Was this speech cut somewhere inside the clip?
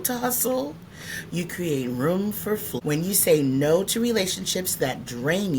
yes; 1 cut; at 2.7 s

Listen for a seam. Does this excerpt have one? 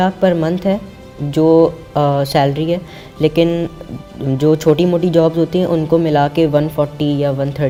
no; 0 cuts

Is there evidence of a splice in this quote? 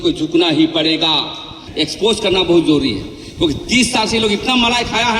yes; 1 cut; at 1.6 s

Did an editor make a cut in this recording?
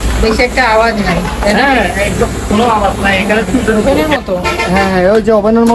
yes; 1 cut; at 3.8 s

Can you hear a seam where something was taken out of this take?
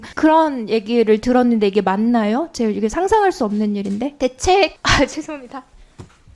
yes; 1 cut; at 4.1 s

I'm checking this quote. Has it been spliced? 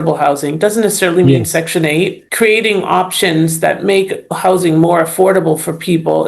yes; 1 cut; at 2.2 s

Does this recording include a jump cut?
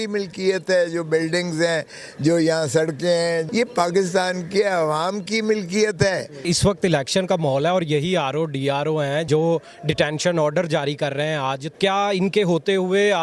yes; 4 cuts; at 3.5 s, 6.5 s, 9.3 s, 11.6 s

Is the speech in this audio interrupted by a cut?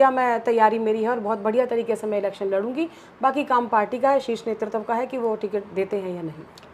no; 0 cuts

